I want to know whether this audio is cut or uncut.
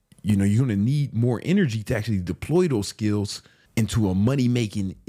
uncut